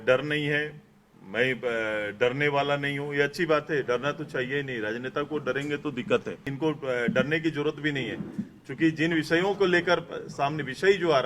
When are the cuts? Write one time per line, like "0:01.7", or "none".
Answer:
0:06.5